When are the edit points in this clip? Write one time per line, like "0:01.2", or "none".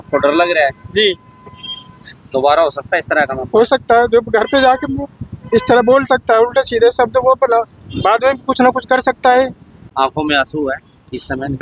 0:09.8